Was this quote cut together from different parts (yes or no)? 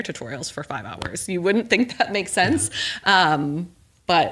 no